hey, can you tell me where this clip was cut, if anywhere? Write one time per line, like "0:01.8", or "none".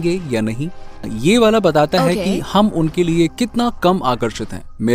0:01.1